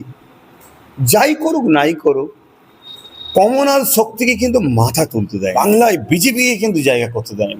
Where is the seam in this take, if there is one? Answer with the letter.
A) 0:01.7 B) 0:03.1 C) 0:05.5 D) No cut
C